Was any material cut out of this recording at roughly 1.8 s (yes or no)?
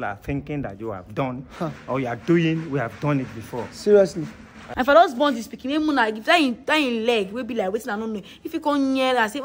no